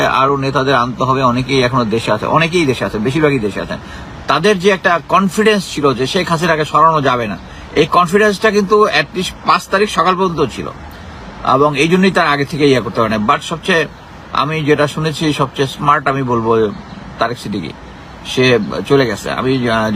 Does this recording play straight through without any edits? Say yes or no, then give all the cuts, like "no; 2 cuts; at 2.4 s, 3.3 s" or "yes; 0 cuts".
yes; 0 cuts